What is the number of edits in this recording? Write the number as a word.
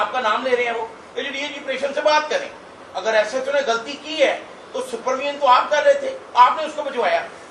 zero